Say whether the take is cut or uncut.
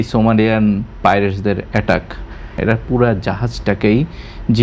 cut